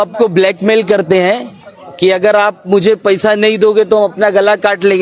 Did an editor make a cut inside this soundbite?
no; 0 cuts

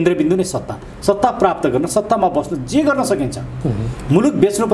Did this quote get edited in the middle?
no; 0 cuts

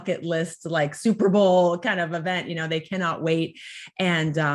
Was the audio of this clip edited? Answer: no; 0 cuts

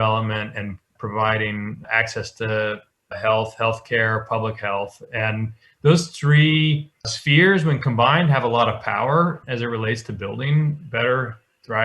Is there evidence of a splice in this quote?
no; 0 cuts

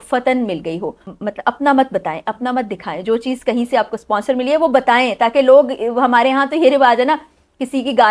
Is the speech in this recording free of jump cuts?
no; 1 cut; at 1.0 s

